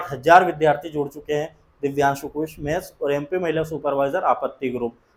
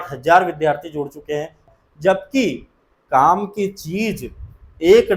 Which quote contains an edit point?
second; 1 cut; at 1.7 s

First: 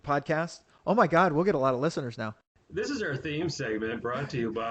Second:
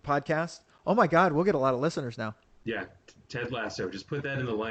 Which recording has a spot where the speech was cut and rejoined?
first; 1 cut; at 2.5 s

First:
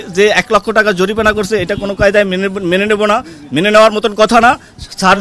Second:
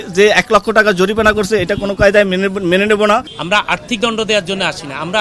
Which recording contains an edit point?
second; 1 cut; at 3.6 s

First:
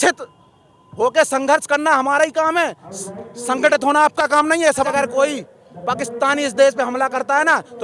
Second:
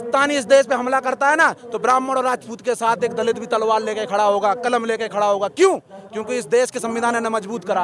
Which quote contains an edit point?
first; 1 cut; at 4.9 s

